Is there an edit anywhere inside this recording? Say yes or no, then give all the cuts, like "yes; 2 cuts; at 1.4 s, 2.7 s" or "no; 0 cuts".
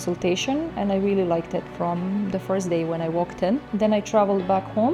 yes; 1 cut; at 3.7 s